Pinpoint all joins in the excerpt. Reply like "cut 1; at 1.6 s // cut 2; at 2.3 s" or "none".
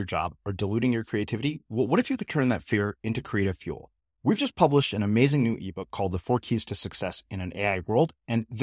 none